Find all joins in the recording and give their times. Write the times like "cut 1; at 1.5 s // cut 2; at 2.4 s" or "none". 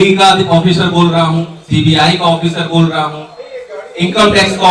none